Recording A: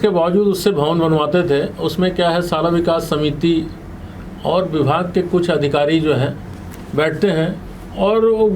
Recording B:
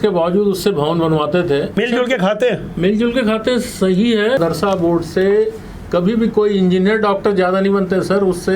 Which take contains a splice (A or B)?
B